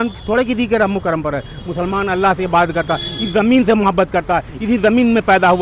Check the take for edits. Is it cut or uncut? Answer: uncut